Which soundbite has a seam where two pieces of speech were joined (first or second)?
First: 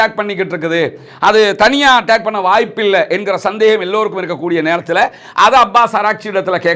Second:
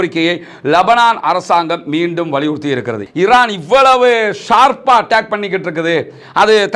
second